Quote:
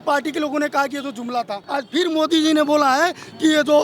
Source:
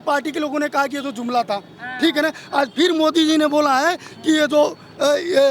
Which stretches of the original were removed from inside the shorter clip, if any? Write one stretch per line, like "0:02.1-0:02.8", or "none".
0:01.6-0:02.5